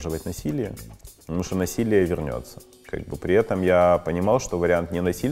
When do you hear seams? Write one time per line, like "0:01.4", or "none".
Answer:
none